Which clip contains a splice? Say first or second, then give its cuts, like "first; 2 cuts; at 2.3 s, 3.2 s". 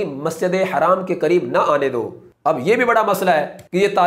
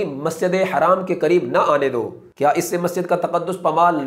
second; 1 cut; at 2.2 s